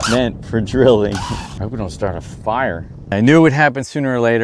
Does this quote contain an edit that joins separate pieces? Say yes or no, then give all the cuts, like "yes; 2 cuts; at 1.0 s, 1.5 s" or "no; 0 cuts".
yes; 2 cuts; at 1.5 s, 3.1 s